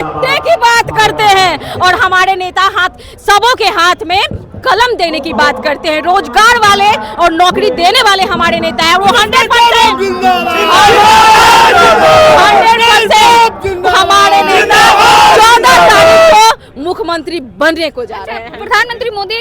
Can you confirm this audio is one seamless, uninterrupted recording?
yes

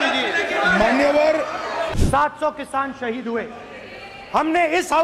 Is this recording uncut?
no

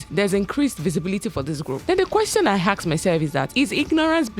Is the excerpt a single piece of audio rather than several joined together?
no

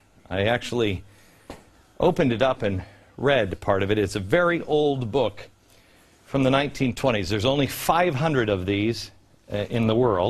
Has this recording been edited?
yes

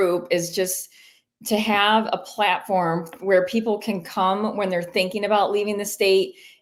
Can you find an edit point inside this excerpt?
no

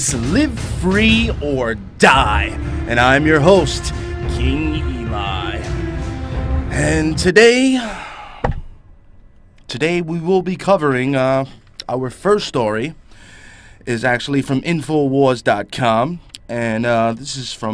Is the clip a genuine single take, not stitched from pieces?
no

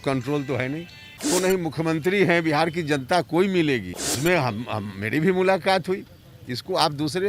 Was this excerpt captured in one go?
no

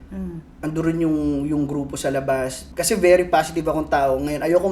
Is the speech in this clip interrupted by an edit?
yes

